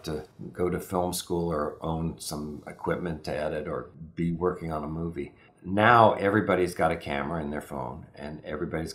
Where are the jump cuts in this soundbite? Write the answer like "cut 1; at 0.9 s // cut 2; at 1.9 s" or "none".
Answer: cut 1; at 4.0 s